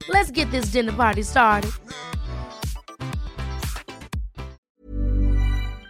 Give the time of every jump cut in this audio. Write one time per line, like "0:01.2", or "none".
0:04.6